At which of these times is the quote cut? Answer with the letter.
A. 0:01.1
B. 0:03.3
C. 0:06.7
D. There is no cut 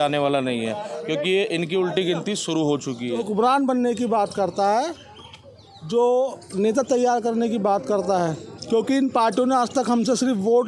B